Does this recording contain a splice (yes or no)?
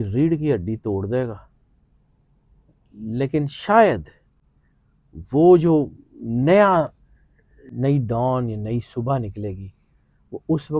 no